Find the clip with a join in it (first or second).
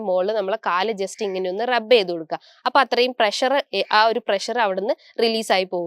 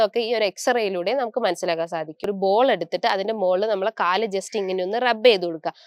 second